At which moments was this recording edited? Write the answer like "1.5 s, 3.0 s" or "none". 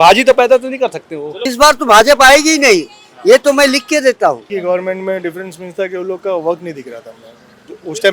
1.5 s, 4.5 s